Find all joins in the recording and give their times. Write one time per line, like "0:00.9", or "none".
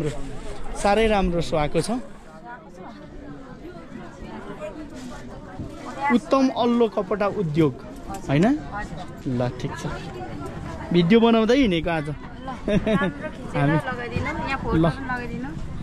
none